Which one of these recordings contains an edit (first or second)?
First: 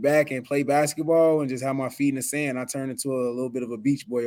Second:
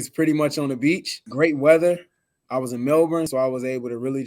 second